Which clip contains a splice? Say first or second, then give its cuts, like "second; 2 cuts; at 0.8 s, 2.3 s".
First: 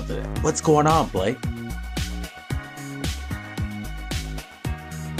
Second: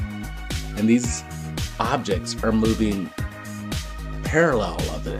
second; 1 cut; at 4.1 s